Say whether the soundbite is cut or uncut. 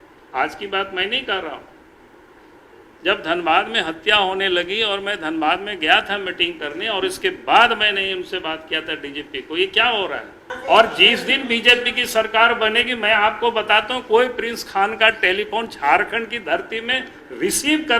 cut